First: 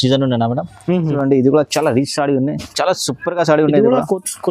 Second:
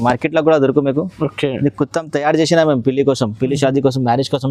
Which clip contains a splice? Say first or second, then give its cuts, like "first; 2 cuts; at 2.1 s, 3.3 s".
first; 1 cut; at 1.1 s